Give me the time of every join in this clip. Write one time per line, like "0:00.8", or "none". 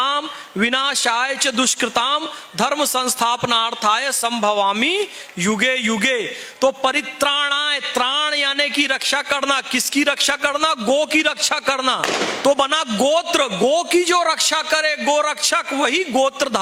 none